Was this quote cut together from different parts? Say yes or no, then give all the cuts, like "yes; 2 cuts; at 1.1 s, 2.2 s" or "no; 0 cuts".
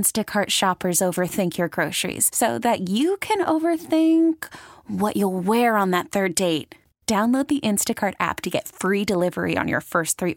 no; 0 cuts